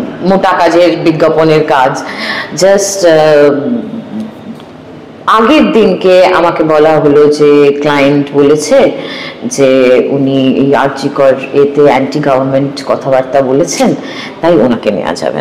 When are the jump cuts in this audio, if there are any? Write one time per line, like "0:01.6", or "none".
none